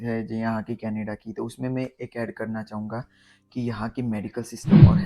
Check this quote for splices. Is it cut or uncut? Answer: uncut